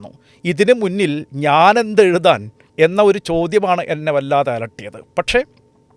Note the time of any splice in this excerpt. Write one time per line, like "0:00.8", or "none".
none